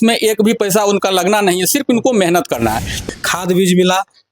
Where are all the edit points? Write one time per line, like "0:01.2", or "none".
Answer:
0:03.0